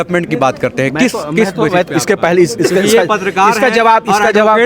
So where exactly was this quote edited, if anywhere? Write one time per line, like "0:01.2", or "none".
none